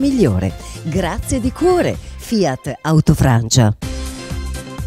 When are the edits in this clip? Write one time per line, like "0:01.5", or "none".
0:03.8